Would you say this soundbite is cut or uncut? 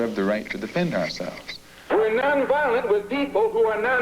cut